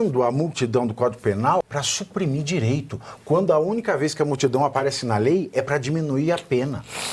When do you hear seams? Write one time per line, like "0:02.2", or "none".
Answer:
0:01.6